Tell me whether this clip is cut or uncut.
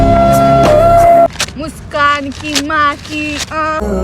cut